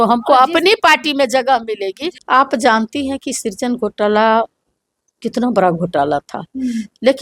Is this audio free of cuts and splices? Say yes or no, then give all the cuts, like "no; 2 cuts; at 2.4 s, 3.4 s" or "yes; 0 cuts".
no; 1 cut; at 2.1 s